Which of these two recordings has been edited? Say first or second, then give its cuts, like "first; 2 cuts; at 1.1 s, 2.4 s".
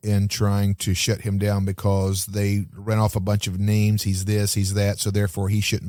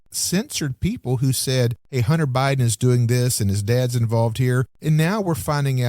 second; 2 cuts; at 1.8 s, 4.7 s